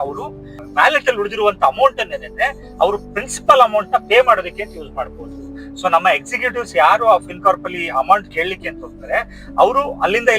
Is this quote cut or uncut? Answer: uncut